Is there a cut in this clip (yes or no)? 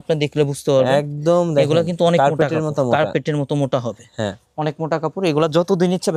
no